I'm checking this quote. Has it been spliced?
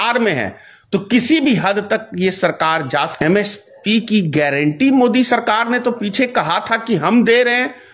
yes; 1 cut; at 3.1 s

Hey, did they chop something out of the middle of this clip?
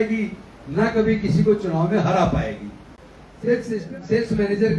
yes; 1 cut; at 3.6 s

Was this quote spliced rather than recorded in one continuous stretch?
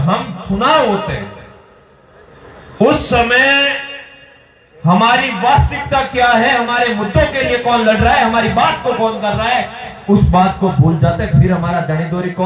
no; 0 cuts

